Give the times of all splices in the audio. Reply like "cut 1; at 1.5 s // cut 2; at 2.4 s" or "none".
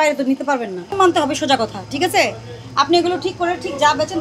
cut 1; at 1.0 s